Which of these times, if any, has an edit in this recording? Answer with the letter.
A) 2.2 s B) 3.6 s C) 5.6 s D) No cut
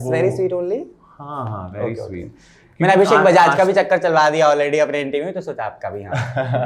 D